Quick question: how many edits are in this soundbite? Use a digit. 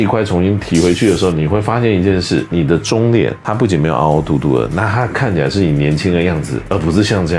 3